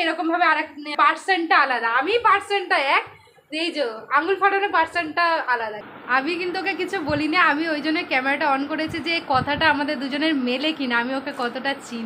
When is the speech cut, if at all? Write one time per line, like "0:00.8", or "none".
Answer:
0:00.9
0:05.8